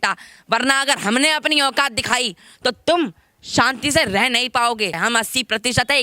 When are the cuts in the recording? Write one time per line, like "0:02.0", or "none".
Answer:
0:05.0